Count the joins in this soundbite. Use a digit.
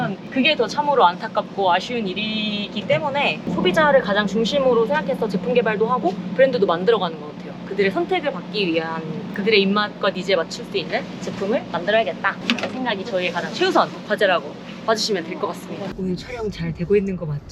1